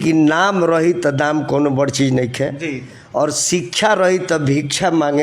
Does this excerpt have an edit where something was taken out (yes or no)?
no